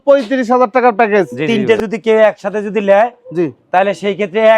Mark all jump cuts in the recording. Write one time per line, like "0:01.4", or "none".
0:01.6